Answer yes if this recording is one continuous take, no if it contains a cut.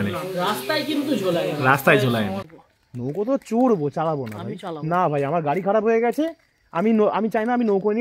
no